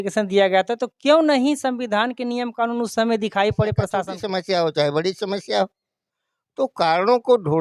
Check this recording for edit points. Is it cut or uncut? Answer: cut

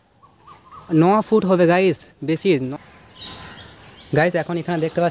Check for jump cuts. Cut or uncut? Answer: cut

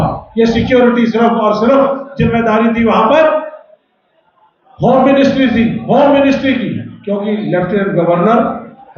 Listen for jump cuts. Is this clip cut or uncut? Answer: uncut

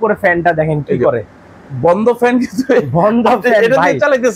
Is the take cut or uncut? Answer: uncut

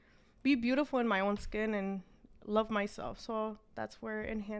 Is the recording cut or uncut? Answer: uncut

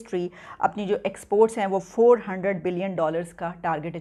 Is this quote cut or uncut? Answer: uncut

